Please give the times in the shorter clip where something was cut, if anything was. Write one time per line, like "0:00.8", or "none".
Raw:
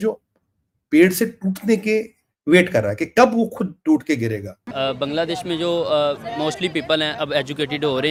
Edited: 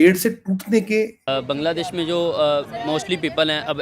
0:01.2